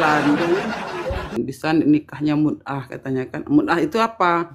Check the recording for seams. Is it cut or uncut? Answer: cut